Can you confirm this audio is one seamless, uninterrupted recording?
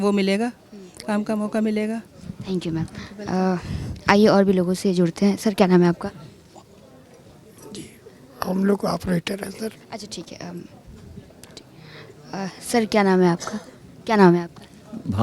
yes; 0 cuts

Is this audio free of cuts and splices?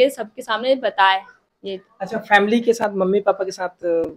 yes; 0 cuts

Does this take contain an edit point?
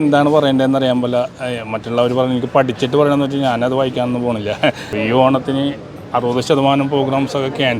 yes; 1 cut; at 4.8 s

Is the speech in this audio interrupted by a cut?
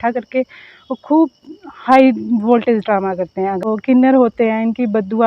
yes; 1 cut; at 3.6 s

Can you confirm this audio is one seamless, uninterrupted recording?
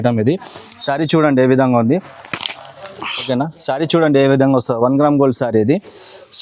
no; 1 cut; at 3.3 s

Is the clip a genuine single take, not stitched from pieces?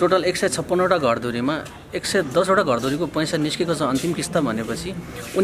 yes; 0 cuts

